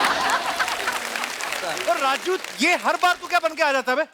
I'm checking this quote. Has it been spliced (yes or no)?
yes